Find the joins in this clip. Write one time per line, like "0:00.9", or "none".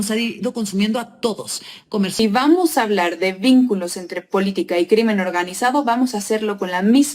0:02.2